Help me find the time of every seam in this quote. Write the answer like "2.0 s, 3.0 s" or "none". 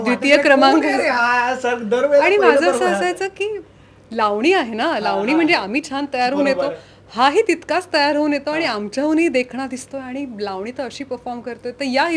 none